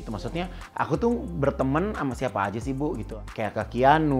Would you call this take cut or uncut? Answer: cut